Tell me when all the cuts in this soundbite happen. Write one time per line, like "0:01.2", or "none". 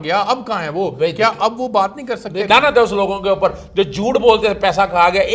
0:02.4